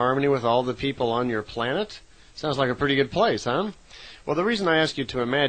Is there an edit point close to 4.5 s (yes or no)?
yes